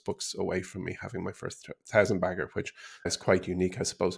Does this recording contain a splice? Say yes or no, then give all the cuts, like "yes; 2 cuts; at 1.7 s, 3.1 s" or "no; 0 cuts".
yes; 1 cut; at 3.1 s